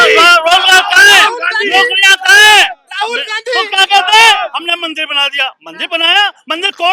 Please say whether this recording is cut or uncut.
uncut